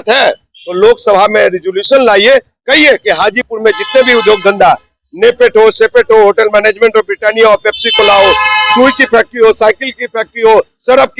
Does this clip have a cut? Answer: no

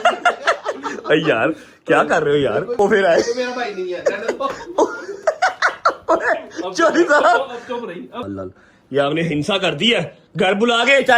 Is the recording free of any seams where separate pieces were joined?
no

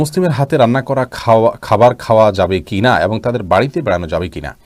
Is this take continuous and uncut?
yes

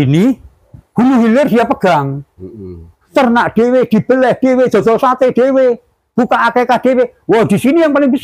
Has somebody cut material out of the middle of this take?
no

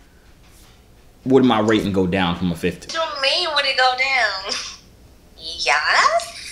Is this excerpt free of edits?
no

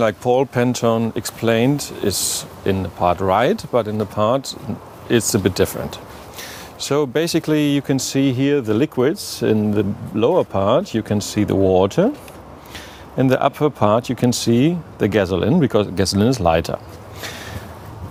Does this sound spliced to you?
no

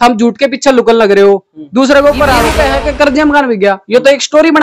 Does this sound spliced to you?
yes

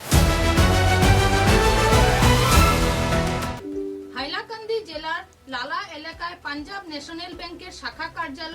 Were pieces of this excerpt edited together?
yes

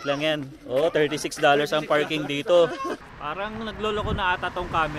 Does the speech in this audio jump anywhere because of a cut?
yes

